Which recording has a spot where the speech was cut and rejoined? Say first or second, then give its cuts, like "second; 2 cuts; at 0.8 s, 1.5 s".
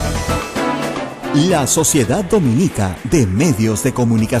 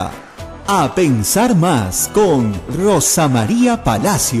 first; 1 cut; at 1.1 s